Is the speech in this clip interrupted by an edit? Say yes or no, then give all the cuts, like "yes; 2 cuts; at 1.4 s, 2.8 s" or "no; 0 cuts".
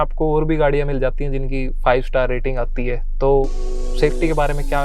no; 0 cuts